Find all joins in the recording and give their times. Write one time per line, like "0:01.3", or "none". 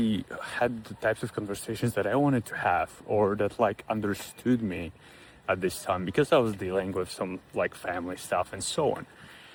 none